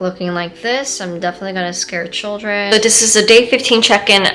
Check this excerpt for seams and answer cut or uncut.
cut